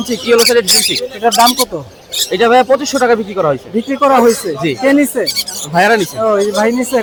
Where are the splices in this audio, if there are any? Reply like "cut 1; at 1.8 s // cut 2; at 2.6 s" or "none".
none